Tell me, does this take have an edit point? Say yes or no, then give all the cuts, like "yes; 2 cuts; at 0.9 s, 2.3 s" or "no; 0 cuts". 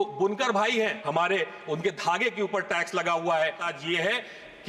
yes; 2 cuts; at 1.0 s, 3.6 s